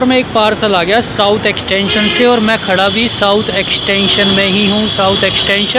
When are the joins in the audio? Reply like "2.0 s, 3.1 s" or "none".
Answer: none